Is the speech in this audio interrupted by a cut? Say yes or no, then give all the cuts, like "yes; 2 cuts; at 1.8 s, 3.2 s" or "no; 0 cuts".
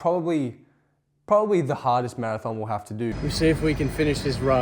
yes; 1 cut; at 3.1 s